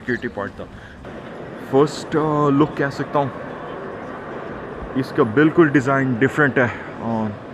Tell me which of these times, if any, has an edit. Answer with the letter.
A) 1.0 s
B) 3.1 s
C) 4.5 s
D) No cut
A